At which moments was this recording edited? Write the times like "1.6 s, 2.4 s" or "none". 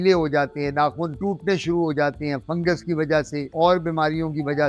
none